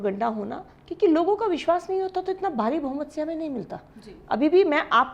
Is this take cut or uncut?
uncut